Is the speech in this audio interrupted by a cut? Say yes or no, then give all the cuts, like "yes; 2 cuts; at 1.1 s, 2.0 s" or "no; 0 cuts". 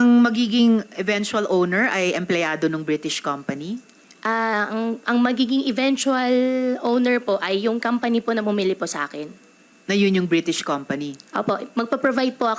no; 0 cuts